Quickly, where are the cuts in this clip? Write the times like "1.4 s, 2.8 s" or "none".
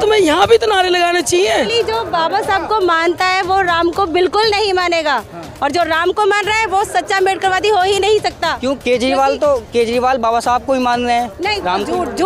1.7 s